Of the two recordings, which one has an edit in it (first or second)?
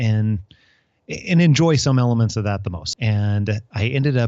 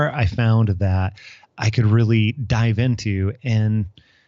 first